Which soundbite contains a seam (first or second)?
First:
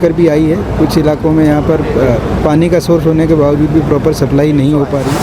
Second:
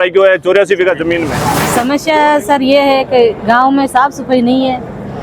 second